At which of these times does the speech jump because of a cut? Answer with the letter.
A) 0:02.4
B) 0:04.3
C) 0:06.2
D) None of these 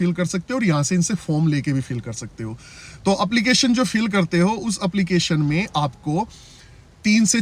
D